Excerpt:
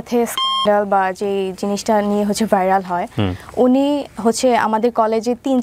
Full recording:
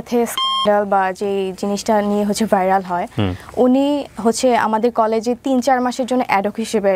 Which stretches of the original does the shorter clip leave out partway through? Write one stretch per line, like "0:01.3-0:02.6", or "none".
none